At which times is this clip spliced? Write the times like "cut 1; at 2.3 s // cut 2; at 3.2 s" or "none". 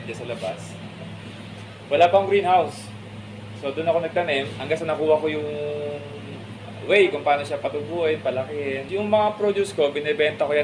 cut 1; at 4.5 s // cut 2; at 8.8 s

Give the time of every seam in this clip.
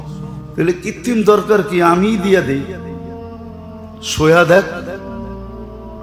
cut 1; at 2.7 s // cut 2; at 4.1 s // cut 3; at 5.1 s

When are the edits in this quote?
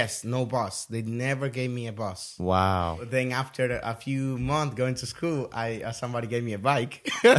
cut 1; at 3.0 s

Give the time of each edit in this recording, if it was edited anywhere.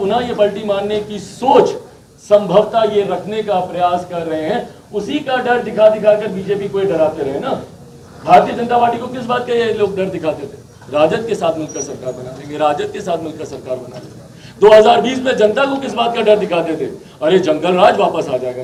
none

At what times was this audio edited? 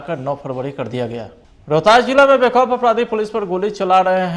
cut 1; at 1.6 s

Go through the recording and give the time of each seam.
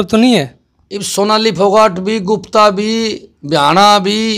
none

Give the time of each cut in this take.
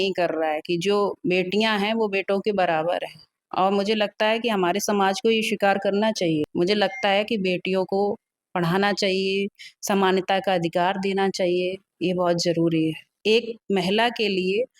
cut 1; at 6.5 s // cut 2; at 13.1 s

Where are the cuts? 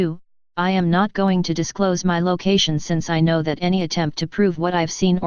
cut 1; at 2.9 s

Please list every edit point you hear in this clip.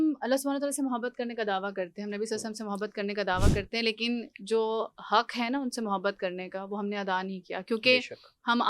none

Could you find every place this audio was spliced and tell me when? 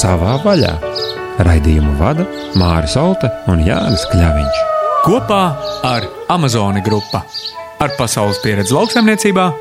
none

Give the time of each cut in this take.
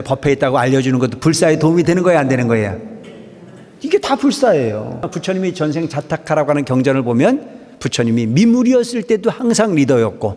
cut 1; at 5.1 s

